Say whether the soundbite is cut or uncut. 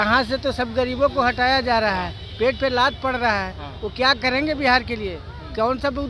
uncut